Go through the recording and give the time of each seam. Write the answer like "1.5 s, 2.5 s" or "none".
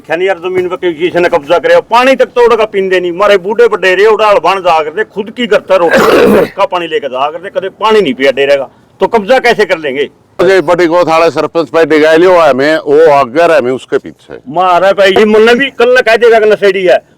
10.4 s, 15.1 s